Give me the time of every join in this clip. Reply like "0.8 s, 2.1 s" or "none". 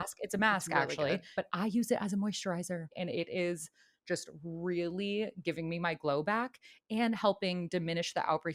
1.3 s